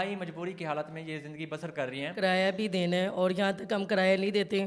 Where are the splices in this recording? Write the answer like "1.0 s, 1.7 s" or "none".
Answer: 2.1 s